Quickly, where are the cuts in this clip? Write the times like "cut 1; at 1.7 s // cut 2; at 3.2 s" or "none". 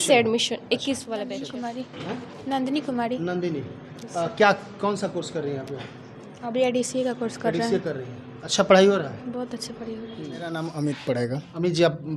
cut 1; at 1.6 s // cut 2; at 10.3 s